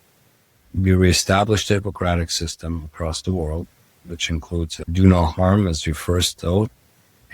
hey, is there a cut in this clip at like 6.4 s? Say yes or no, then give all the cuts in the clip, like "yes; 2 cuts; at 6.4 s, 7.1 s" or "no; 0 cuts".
yes; 1 cut; at 6.4 s